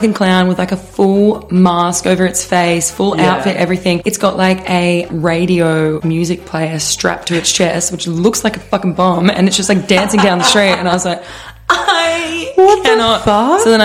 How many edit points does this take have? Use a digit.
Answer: 2